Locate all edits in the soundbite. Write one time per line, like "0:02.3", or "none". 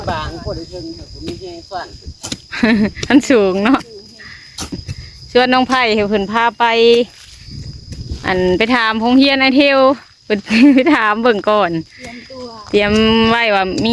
0:04.9